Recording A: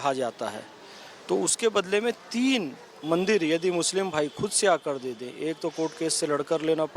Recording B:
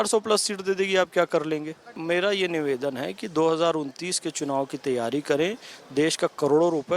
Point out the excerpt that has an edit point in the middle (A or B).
B